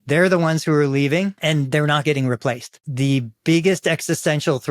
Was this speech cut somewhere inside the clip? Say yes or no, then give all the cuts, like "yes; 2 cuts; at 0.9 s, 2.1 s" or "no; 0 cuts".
yes; 2 cuts; at 1.4 s, 2.8 s